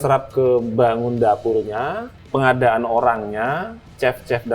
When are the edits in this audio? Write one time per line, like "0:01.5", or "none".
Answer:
0:02.1

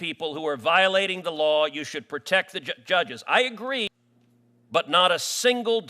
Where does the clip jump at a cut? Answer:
0:03.9

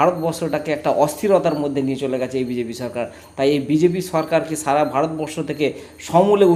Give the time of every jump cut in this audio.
none

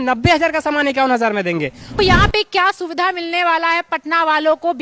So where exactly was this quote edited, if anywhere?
0:02.0

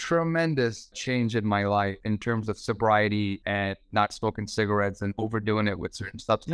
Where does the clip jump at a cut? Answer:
0:01.0
0:02.0
0:03.4
0:05.2

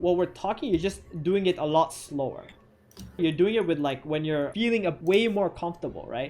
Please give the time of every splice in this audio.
0:03.2
0:04.9

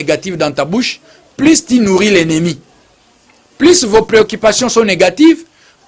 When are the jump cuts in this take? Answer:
none

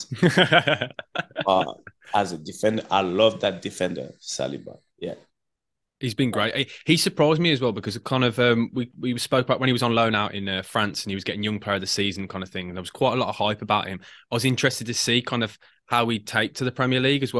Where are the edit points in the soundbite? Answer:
none

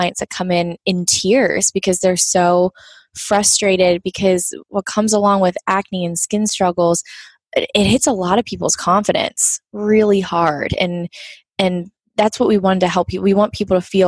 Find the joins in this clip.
none

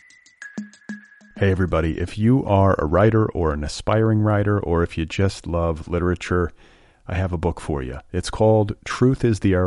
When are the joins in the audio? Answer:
0:00.9

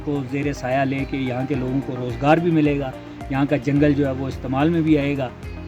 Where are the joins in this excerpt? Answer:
none

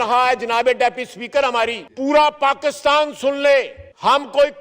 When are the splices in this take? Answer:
0:01.9

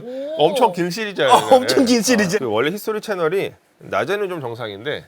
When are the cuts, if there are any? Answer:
0:02.3

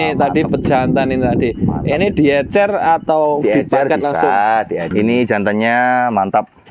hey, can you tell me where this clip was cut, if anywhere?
0:04.9

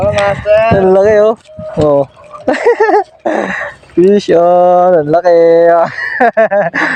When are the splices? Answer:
none

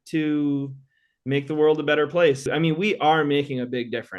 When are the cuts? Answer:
0:02.5

